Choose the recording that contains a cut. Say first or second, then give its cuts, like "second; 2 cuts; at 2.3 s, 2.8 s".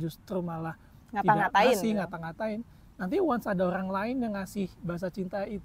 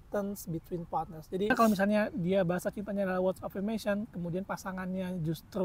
second; 1 cut; at 1.5 s